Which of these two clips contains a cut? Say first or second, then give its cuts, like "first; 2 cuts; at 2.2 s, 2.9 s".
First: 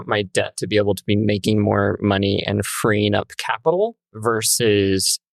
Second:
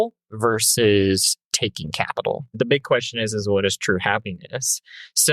second; 1 cut; at 2.5 s